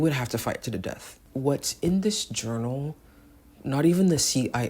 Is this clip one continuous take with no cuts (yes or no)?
no